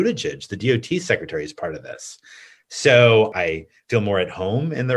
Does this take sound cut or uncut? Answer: cut